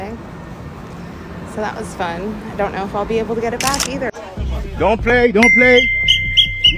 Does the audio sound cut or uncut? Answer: cut